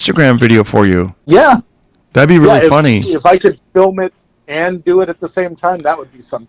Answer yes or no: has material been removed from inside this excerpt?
yes